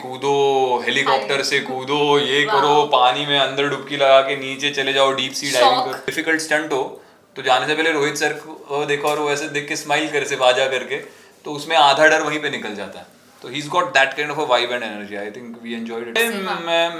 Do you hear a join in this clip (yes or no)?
yes